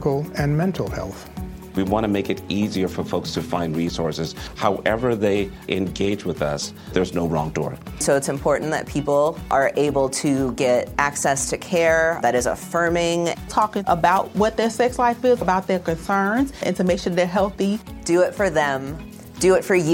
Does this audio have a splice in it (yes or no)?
no